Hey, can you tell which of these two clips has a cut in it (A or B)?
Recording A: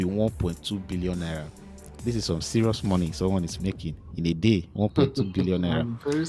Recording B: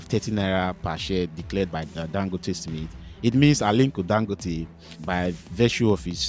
B